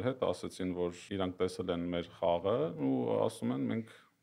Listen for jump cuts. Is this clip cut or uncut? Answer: cut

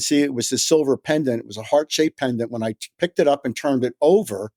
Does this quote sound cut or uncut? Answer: uncut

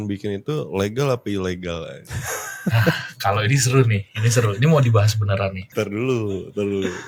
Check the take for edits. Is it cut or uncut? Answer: uncut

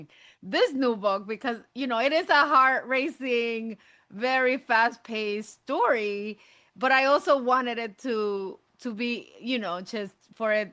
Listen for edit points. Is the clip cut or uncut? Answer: uncut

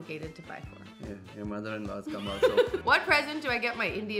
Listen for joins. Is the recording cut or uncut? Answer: cut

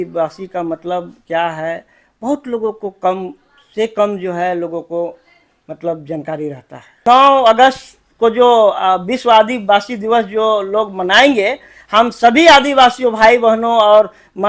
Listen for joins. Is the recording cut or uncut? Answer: cut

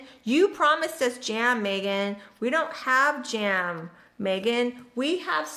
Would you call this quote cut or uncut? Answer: uncut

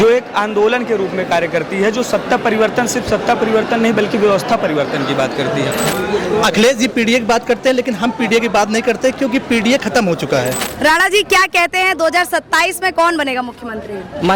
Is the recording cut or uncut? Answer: cut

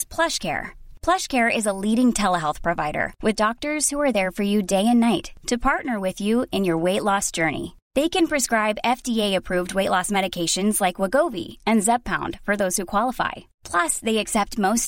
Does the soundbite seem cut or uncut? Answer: uncut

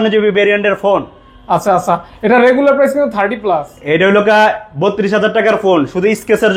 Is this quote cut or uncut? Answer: uncut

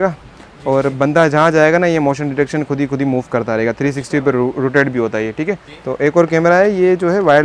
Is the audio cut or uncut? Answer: cut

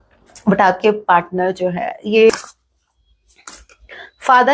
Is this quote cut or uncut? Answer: cut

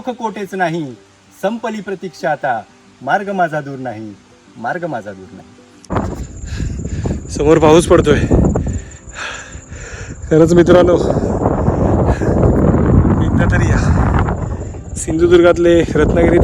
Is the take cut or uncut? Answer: cut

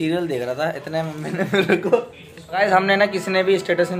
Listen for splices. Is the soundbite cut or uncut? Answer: cut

